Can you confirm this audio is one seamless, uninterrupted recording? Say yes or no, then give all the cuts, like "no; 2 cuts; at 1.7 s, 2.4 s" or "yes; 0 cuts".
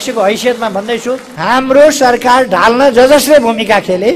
no; 1 cut; at 1.3 s